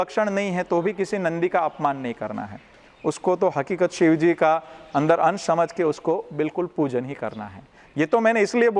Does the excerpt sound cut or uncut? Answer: uncut